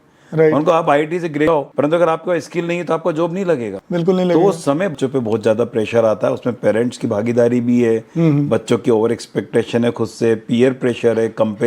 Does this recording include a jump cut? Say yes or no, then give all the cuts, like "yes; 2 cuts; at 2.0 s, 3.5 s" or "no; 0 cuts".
yes; 2 cuts; at 1.5 s, 4.9 s